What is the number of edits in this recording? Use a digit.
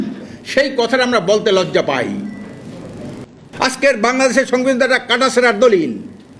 1